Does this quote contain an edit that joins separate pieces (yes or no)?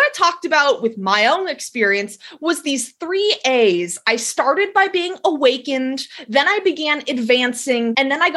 no